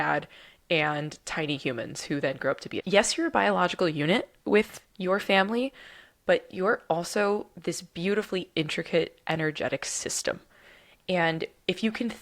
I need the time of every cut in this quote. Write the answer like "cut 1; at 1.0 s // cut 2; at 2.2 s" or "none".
cut 1; at 2.8 s